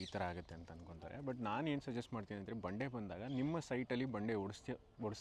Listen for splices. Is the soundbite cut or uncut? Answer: uncut